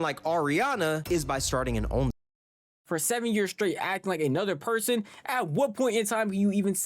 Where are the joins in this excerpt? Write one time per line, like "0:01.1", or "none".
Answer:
0:02.8